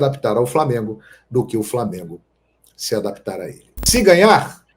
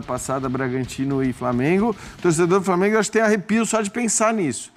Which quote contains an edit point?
first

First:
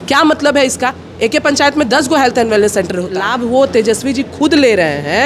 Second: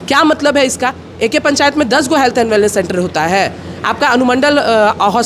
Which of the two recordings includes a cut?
first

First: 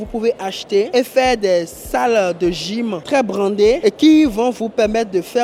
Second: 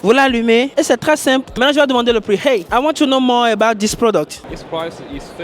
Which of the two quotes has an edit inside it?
second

